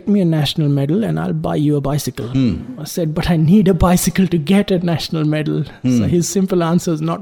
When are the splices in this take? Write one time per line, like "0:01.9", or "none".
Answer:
none